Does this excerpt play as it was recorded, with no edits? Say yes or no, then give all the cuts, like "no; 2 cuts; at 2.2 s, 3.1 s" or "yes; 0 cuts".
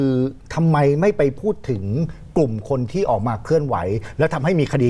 yes; 0 cuts